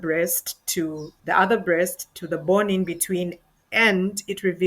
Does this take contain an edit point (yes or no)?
yes